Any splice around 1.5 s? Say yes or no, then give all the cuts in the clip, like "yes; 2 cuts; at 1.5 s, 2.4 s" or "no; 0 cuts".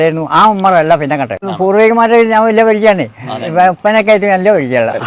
yes; 1 cut; at 1.5 s